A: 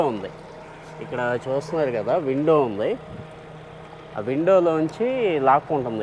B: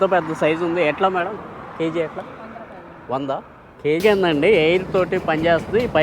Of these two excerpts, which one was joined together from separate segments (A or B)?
B